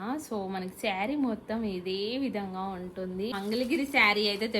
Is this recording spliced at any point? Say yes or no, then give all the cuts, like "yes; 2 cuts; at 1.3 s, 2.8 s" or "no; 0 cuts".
yes; 1 cut; at 3.4 s